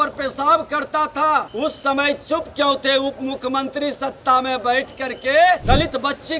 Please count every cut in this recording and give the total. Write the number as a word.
two